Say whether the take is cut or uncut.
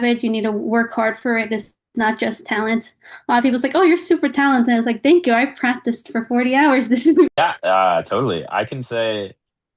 cut